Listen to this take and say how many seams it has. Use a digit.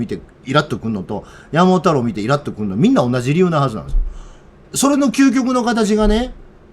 1